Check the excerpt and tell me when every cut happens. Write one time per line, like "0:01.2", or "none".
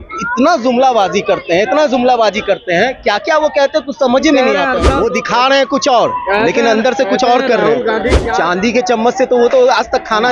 0:04.9
0:08.2